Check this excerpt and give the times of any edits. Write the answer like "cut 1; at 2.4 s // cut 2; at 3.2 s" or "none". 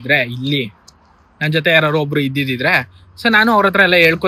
none